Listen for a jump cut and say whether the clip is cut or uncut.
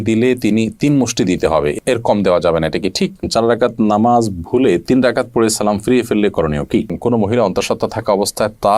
cut